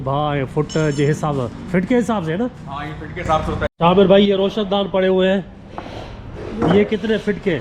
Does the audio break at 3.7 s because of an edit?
yes; 1 cut; at 3.7 s

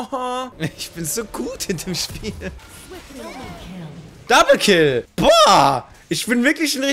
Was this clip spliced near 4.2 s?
yes; 2 cuts; at 2.6 s, 4.2 s

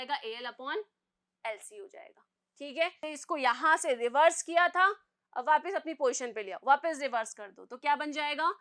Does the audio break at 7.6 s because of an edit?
no; 1 cut; at 3.0 s

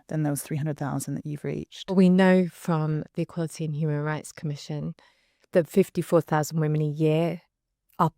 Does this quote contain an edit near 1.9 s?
yes; 1 cut; at 1.9 s

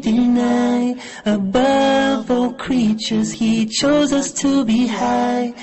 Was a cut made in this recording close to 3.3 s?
yes; 1 cut; at 3.3 s

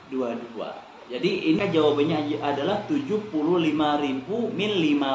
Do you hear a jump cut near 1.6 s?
yes; 1 cut; at 1.6 s

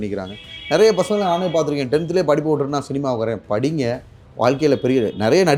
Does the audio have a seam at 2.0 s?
no; 0 cuts

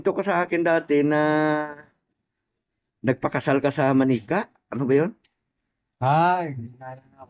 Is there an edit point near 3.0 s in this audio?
no; 0 cuts

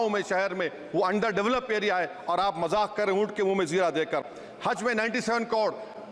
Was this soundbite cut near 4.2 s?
no; 0 cuts

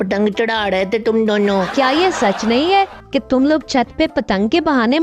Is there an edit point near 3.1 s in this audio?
no; 1 cut; at 1.7 s

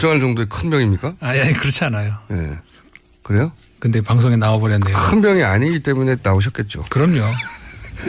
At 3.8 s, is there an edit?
no; 1 cut; at 1.3 s

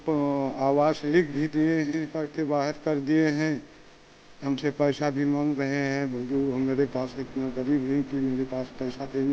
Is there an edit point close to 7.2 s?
no; 1 cut; at 2.2 s

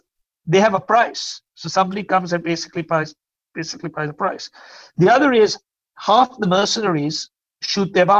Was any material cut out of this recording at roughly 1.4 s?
no; 1 cut; at 3.0 s

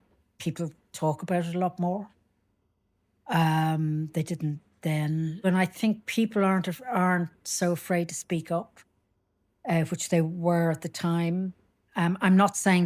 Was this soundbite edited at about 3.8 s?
no; 1 cut; at 5.5 s

